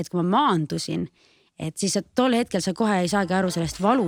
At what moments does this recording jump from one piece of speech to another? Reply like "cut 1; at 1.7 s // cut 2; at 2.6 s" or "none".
none

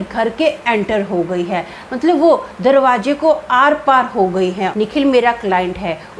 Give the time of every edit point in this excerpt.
cut 1; at 4.7 s

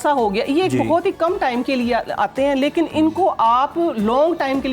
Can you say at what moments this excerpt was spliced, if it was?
none

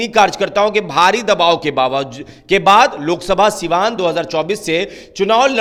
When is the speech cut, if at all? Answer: none

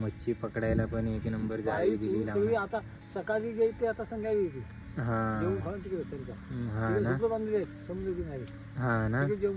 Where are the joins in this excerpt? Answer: none

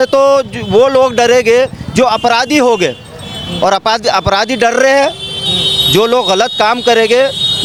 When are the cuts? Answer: none

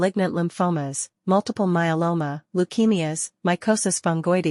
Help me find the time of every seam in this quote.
none

